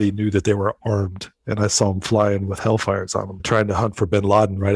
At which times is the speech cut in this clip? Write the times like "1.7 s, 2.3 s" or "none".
none